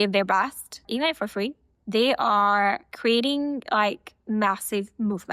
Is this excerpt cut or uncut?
uncut